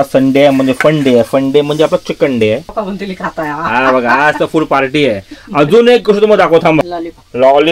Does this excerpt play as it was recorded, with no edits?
no; 2 cuts; at 2.7 s, 6.9 s

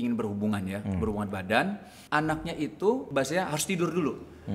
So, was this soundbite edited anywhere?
yes; 2 cuts; at 1.9 s, 3.1 s

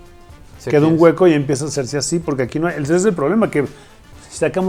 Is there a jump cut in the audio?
no; 0 cuts

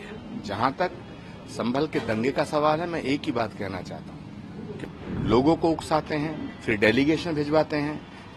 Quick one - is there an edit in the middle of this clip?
yes; 1 cut; at 4.8 s

